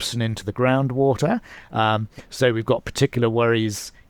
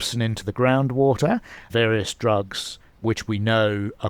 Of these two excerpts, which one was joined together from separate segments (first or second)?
second